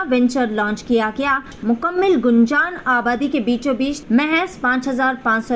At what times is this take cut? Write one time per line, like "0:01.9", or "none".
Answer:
0:01.5
0:04.0